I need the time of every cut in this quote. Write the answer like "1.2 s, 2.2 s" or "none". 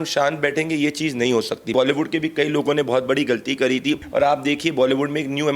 1.7 s, 4.0 s